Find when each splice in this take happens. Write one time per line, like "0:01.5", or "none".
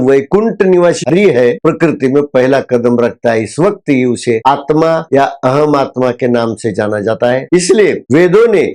0:01.0
0:05.0